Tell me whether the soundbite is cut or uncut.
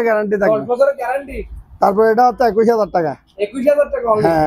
uncut